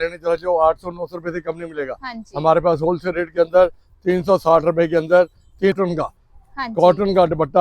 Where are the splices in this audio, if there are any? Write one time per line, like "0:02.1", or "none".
0:05.8